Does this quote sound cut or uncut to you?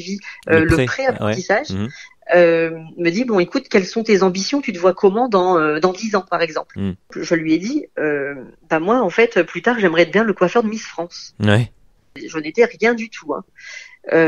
cut